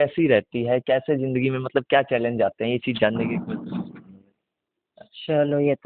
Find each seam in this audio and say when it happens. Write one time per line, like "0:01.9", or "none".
none

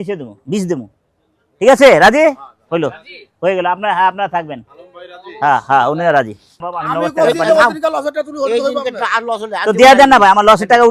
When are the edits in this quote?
0:06.7

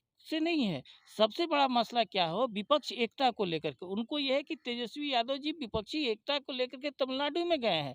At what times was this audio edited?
none

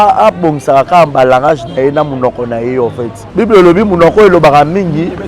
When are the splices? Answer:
0:03.2

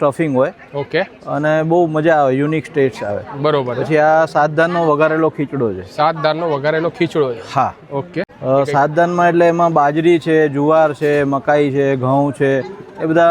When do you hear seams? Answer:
none

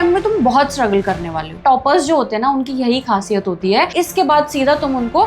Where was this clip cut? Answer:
0:01.5
0:03.9

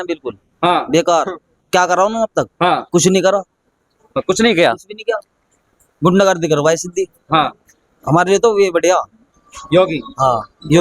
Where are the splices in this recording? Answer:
none

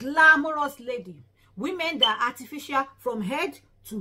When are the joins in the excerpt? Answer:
none

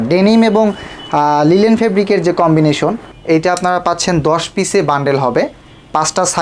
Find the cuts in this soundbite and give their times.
0:03.1

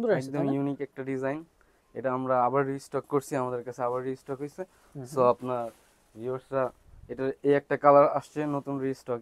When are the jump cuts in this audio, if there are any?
none

